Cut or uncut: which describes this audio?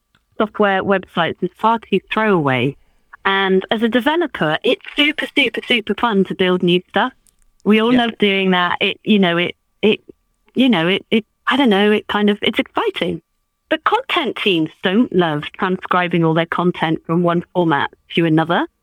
uncut